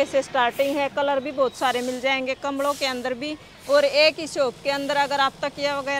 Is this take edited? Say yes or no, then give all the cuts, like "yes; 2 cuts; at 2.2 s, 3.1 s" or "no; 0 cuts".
no; 0 cuts